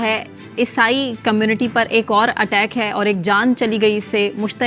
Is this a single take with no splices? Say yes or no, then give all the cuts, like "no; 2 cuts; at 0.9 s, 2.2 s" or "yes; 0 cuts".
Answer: yes; 0 cuts